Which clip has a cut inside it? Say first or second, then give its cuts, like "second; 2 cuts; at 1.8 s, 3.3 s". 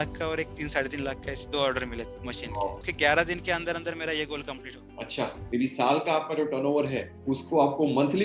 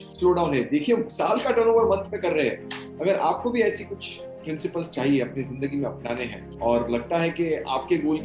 first; 2 cuts; at 2.8 s, 5.4 s